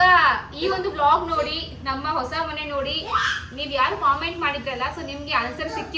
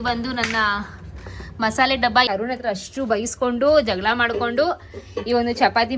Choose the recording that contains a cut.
second; 1 cut; at 2.3 s

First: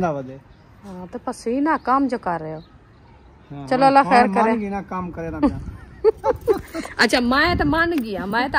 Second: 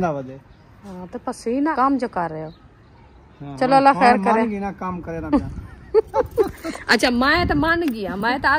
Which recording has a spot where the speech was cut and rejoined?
second; 1 cut; at 1.7 s

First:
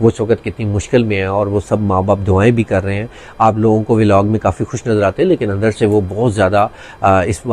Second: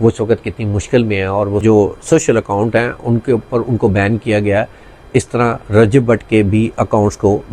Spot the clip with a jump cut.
second; 1 cut; at 1.6 s

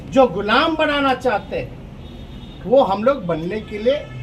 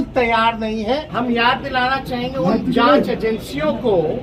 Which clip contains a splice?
second; 1 cut; at 1.1 s

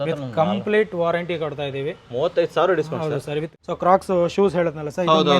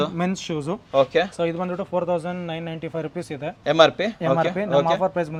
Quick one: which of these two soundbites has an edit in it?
first; 1 cut; at 3.5 s

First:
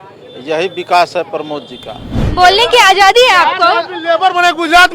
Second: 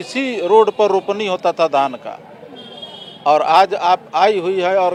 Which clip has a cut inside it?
first; 1 cut; at 2.2 s

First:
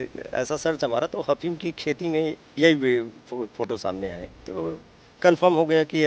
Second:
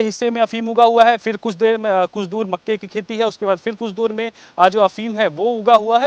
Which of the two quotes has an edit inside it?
first; 1 cut; at 4.5 s

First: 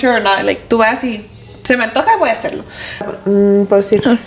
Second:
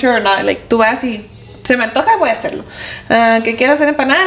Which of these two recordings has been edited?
first; 1 cut; at 3.1 s

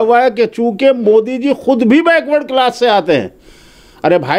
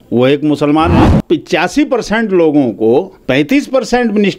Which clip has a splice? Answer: second; 1 cut; at 1.0 s

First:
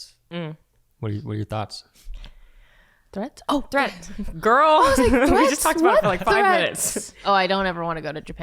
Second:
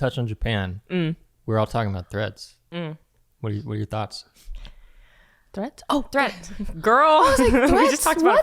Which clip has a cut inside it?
first; 1 cut; at 7.2 s

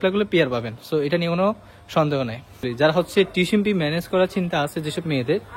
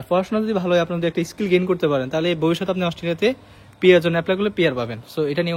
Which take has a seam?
first; 1 cut; at 2.7 s

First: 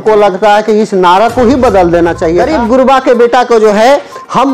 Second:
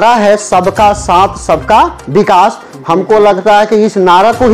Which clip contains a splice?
first; 1 cut; at 2.4 s

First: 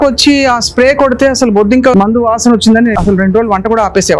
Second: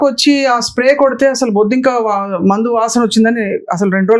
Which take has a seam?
first; 2 cuts; at 1.9 s, 2.9 s

